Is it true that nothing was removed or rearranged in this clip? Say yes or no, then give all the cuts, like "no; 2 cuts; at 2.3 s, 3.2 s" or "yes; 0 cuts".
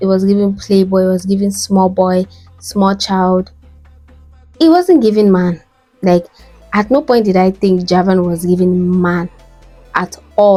yes; 0 cuts